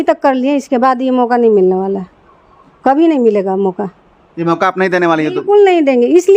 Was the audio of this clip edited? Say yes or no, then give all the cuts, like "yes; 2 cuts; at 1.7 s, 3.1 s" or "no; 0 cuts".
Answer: no; 0 cuts